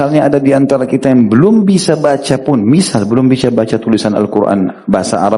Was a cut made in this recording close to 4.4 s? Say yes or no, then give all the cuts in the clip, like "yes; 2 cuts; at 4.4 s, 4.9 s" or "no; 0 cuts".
no; 0 cuts